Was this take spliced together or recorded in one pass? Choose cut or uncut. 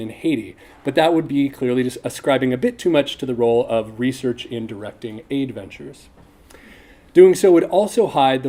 uncut